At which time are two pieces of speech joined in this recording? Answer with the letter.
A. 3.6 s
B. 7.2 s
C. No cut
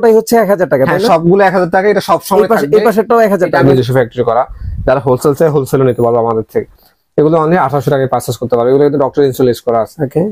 A